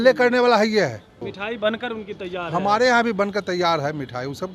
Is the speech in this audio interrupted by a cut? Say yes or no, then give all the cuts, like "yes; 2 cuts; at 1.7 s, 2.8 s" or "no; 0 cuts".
yes; 1 cut; at 1.2 s